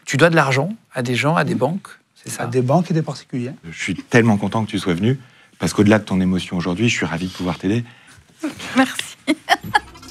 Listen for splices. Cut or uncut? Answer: cut